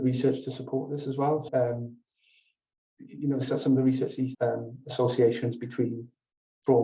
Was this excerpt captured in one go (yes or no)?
no